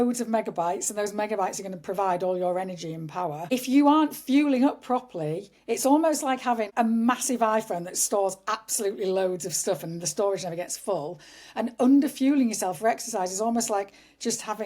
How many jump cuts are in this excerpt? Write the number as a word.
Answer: two